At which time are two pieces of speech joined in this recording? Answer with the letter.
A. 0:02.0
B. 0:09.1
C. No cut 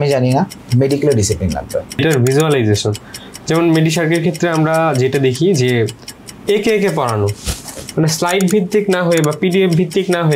A